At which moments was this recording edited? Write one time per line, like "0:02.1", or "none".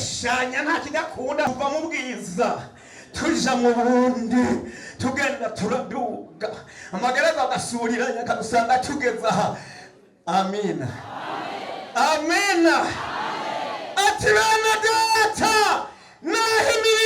0:01.5